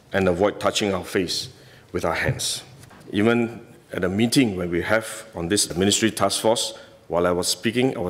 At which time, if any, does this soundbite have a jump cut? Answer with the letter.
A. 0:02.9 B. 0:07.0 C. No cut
A